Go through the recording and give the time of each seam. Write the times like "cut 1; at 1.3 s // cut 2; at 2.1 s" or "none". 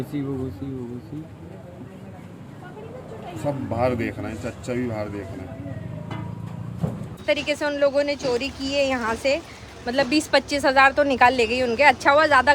cut 1; at 7.1 s